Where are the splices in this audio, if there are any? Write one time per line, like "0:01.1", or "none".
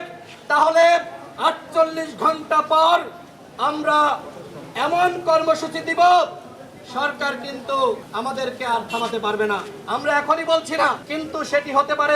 0:08.1
0:11.1